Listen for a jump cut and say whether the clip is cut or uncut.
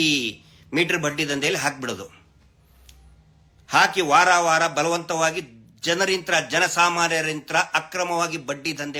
uncut